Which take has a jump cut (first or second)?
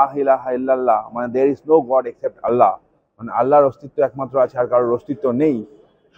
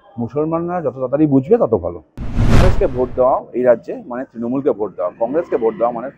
second